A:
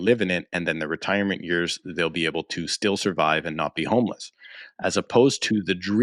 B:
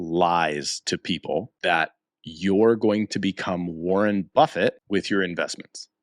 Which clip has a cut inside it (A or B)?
B